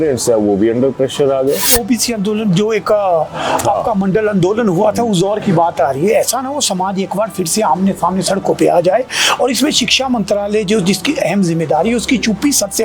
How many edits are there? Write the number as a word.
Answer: one